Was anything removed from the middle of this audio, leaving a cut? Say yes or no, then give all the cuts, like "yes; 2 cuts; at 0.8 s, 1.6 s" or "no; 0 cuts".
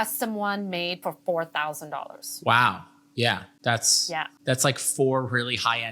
yes; 1 cut; at 3.9 s